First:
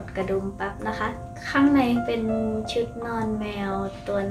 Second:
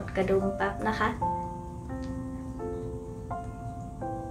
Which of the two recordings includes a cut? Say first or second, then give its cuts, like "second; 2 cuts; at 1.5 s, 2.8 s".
first; 1 cut; at 1.2 s